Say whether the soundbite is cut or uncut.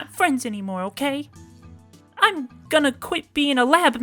uncut